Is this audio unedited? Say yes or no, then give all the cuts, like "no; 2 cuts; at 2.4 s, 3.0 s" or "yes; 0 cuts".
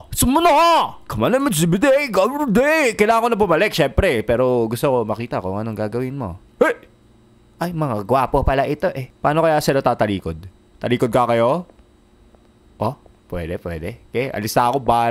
no; 2 cuts; at 6.4 s, 9.1 s